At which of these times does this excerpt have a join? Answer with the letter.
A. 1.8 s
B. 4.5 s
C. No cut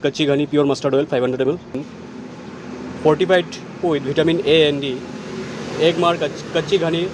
A